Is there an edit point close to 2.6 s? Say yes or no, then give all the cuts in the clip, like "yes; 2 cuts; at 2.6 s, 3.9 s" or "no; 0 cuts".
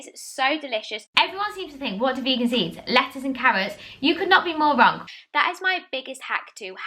no; 2 cuts; at 1.1 s, 5.0 s